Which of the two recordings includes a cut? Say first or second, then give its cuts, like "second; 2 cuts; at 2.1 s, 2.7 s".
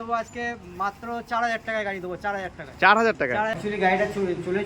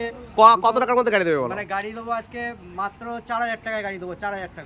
first; 1 cut; at 3.6 s